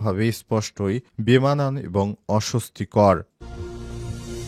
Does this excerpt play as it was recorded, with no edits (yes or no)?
no